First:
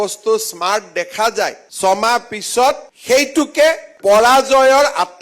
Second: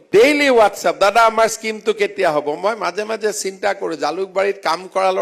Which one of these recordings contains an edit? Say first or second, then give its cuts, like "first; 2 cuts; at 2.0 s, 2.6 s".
first; 3 cuts; at 1.6 s, 2.9 s, 3.9 s